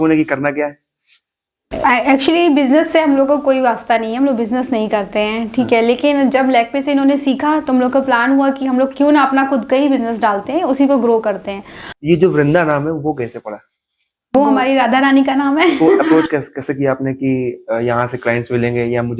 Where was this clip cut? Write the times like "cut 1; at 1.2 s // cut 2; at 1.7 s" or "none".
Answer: cut 1; at 11.9 s // cut 2; at 16.1 s